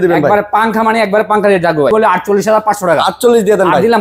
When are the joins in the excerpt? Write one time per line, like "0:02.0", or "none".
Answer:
0:01.9